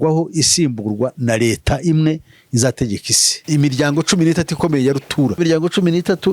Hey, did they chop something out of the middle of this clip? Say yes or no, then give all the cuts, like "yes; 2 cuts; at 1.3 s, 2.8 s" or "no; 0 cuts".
yes; 2 cuts; at 3.4 s, 5.4 s